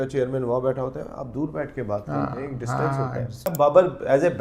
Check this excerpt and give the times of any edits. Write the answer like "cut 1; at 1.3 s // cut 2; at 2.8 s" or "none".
cut 1; at 3.5 s

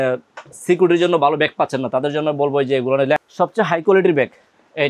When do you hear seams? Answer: cut 1; at 3.2 s

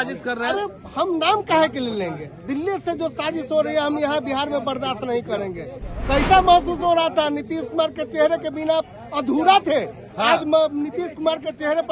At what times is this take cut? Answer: none

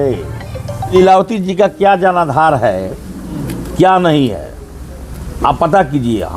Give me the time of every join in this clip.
cut 1; at 0.9 s

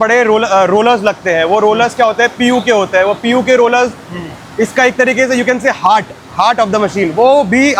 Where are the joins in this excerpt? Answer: none

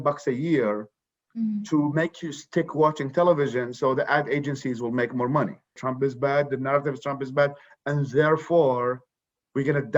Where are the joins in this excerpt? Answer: cut 1; at 5.8 s

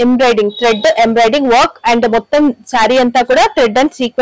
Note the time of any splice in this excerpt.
none

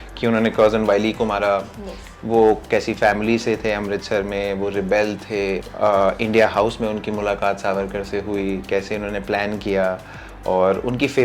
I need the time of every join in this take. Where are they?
cut 1; at 5.7 s

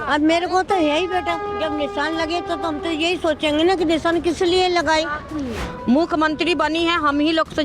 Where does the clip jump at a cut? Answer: cut 1; at 5.6 s

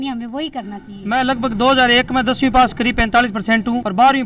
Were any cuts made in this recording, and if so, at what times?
cut 1; at 1.1 s

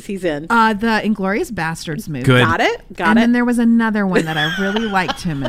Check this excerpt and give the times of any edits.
none

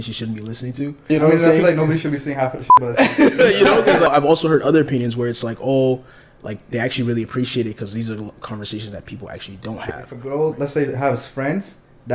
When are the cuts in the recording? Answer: cut 1; at 1.1 s // cut 2; at 4.1 s // cut 3; at 10.2 s

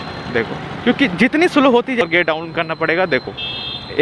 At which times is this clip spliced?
cut 1; at 2.0 s

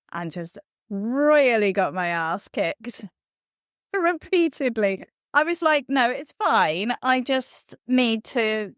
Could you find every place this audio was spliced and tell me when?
none

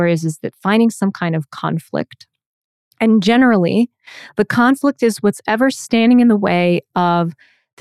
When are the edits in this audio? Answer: none

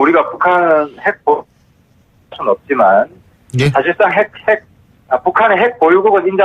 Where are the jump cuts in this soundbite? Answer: cut 1; at 4.3 s

